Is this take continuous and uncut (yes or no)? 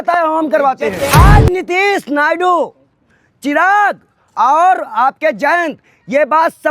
no